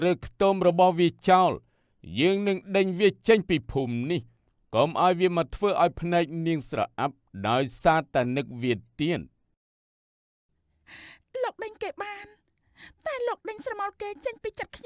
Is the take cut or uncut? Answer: uncut